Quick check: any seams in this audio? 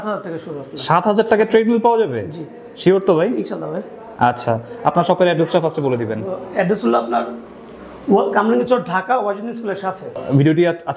no; 0 cuts

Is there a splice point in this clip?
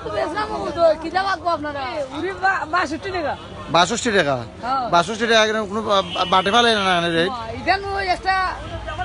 yes; 1 cut; at 2.0 s

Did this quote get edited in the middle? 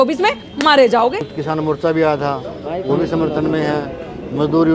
yes; 1 cut; at 1.3 s

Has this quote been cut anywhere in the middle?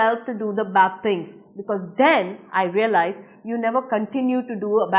no; 0 cuts

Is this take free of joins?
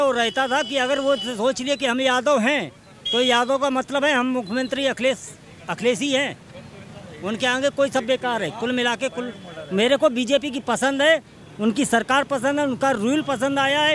yes; 0 cuts

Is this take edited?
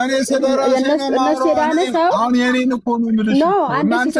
no; 0 cuts

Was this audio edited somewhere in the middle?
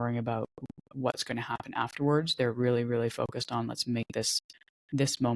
no; 0 cuts

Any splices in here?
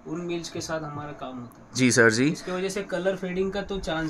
no; 0 cuts

